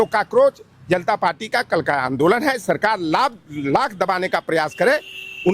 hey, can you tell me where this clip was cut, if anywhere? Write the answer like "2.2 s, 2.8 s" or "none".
none